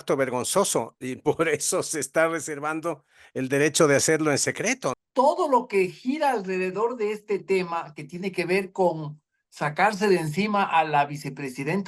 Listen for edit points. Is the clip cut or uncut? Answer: cut